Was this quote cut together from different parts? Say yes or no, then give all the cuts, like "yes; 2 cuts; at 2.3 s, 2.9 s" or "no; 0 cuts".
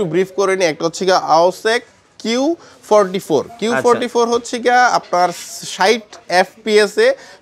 no; 0 cuts